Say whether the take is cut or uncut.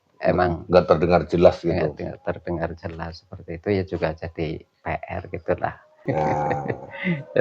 cut